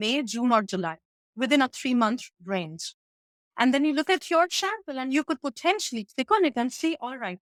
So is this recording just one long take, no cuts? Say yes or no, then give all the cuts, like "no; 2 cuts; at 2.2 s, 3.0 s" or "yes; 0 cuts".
yes; 0 cuts